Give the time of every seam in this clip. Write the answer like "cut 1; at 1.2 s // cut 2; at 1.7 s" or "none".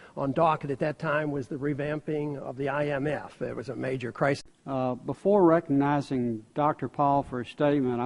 none